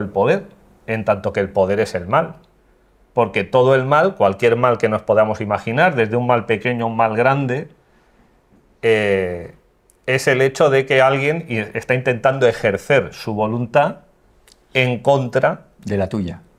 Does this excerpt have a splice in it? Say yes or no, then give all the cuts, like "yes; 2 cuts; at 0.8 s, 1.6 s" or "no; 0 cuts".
no; 0 cuts